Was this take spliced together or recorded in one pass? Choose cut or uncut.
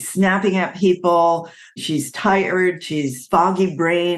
cut